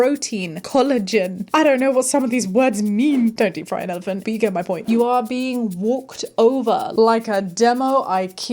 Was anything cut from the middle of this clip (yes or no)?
yes